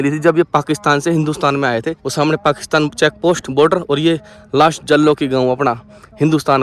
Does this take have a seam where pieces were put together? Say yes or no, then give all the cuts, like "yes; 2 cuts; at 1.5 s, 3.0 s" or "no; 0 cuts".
yes; 1 cut; at 2.0 s